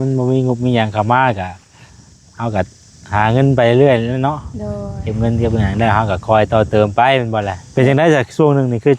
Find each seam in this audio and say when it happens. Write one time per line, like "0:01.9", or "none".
0:07.6